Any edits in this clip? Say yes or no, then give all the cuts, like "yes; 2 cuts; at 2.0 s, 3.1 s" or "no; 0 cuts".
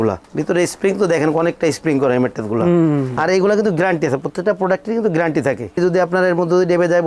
yes; 2 cuts; at 3.1 s, 5.8 s